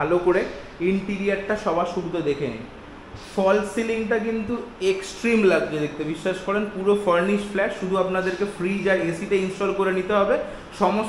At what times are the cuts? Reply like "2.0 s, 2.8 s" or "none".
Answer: none